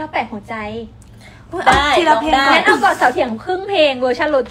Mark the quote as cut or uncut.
uncut